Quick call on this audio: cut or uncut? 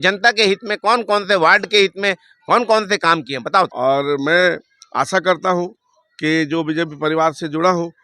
cut